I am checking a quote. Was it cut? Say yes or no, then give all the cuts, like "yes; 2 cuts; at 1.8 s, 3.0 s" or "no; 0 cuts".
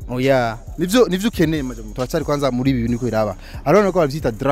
yes; 1 cut; at 1.8 s